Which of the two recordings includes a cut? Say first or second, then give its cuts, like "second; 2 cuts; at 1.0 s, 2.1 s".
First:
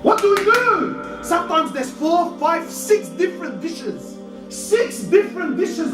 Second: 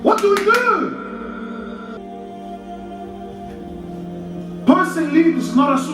first; 1 cut; at 1.1 s